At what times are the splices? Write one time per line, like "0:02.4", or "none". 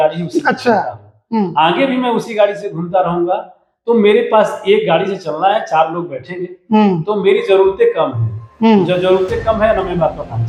none